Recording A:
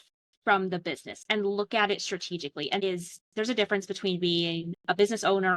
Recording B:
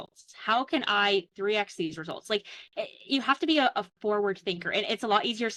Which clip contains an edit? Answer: A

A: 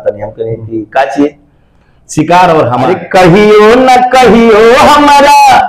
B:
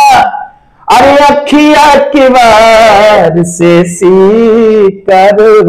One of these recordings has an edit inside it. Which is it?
A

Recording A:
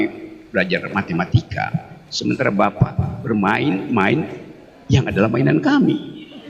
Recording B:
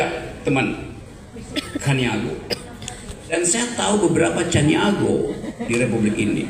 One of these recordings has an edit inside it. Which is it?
B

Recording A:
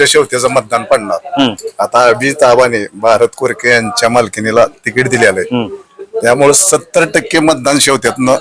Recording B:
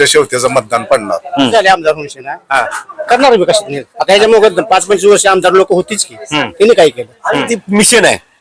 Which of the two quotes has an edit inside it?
B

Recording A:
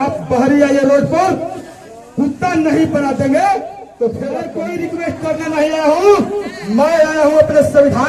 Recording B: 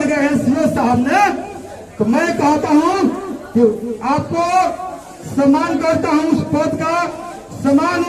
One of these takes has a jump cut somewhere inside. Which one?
A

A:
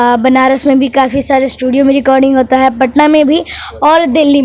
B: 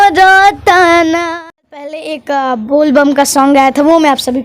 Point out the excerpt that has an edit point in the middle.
B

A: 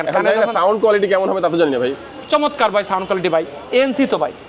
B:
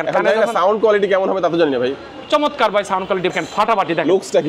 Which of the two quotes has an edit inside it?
B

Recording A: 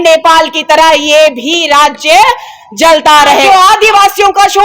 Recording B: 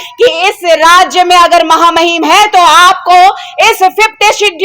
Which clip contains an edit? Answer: A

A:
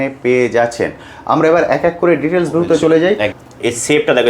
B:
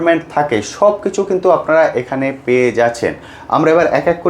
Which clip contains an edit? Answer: A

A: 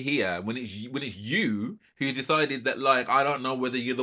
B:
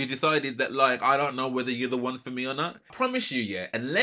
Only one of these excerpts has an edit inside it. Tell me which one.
B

